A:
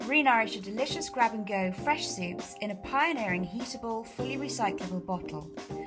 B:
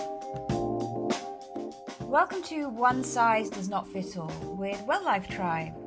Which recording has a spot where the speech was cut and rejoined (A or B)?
B